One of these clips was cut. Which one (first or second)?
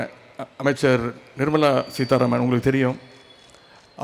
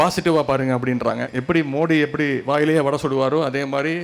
second